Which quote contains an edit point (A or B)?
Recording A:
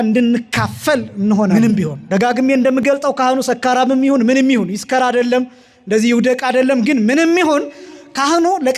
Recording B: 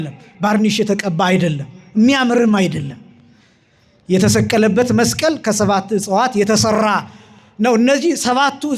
A